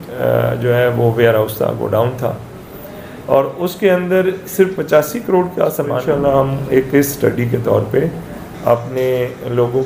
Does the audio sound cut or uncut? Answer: cut